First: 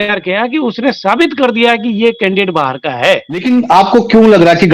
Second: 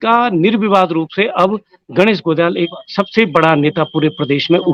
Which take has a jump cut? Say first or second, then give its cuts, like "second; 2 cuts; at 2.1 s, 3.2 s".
first; 1 cut; at 3.4 s